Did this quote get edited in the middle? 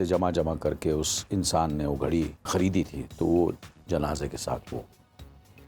yes; 1 cut; at 2.4 s

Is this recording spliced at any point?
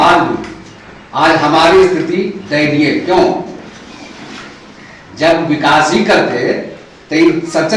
no; 0 cuts

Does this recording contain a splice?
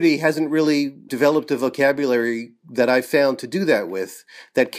yes; 1 cut; at 1.1 s

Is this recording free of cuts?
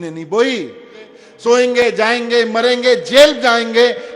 no; 1 cut; at 1.2 s

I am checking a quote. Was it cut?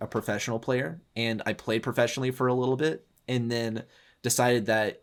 no; 0 cuts

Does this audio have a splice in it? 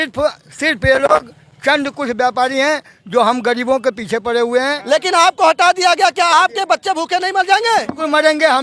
yes; 1 cut; at 4.8 s

